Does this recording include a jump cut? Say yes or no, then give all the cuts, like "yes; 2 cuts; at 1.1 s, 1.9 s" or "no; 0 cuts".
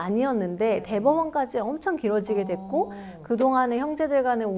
no; 0 cuts